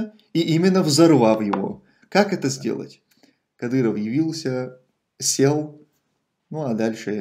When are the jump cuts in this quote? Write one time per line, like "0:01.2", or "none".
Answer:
0:02.9